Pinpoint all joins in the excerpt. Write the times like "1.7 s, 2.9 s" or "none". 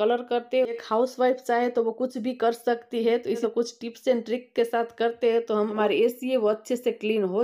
0.8 s, 3.4 s, 5.7 s